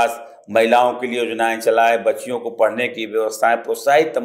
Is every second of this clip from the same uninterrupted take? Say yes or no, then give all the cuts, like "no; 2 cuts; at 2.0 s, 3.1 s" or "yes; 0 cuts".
yes; 0 cuts